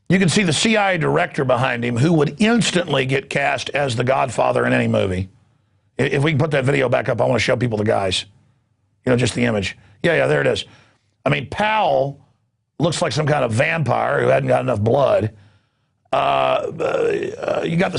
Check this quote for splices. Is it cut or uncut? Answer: uncut